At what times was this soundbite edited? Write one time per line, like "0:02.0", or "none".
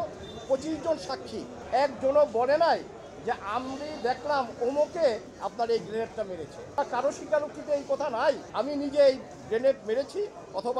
0:01.5
0:06.8
0:08.5

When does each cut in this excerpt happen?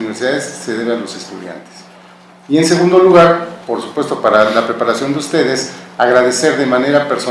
0:06.4

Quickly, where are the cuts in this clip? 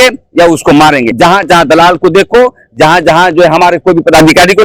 0:01.1

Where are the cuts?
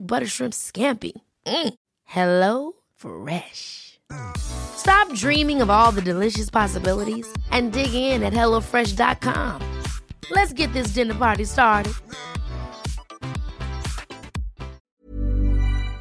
0:14.8

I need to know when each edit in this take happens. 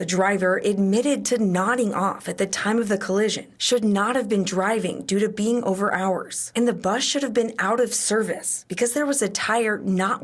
none

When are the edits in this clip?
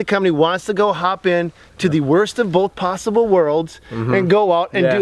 none

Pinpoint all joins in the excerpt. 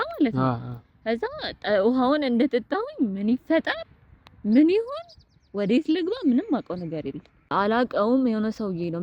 0:07.5

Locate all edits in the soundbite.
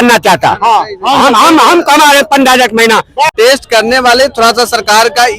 0:03.3

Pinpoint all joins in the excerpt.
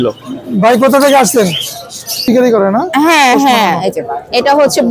0:02.2

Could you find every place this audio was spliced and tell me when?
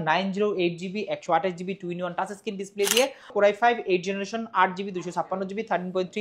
0:03.3

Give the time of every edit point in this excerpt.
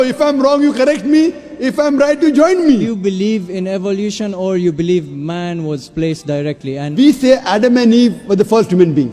0:02.9
0:06.9

